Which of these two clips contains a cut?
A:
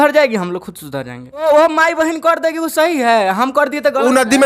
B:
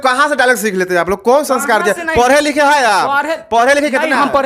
A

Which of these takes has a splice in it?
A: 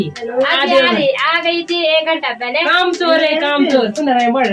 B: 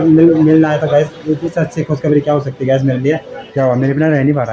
B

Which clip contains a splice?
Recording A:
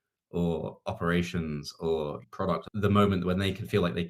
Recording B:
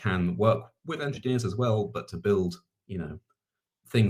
A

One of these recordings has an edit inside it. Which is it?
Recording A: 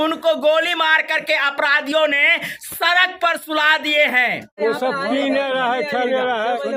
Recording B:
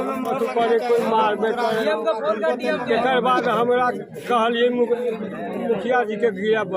A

